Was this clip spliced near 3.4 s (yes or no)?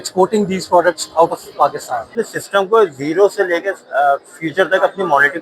no